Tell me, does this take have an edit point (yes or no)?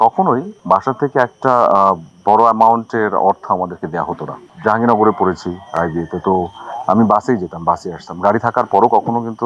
no